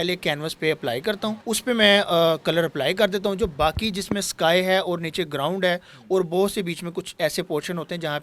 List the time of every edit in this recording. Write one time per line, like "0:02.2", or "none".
0:01.4